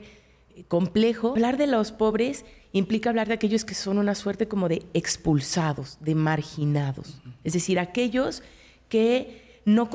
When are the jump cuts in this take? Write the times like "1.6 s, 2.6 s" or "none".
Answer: 1.4 s